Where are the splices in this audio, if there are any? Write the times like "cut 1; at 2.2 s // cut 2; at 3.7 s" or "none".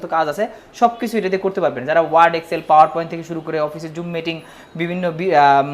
none